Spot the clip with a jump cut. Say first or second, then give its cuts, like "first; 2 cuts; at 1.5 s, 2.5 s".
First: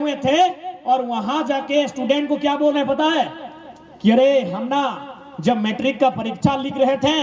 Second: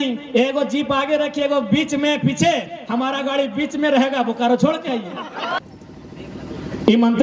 second; 1 cut; at 5.6 s